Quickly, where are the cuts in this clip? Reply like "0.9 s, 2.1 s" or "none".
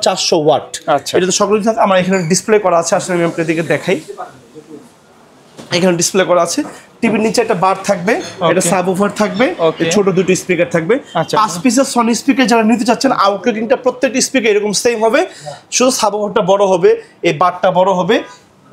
none